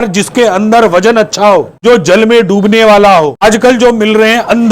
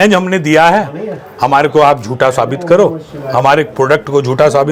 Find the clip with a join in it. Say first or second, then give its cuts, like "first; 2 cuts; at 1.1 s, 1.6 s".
first; 2 cuts; at 1.7 s, 3.4 s